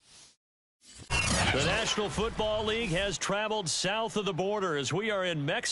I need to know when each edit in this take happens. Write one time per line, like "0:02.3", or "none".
0:01.1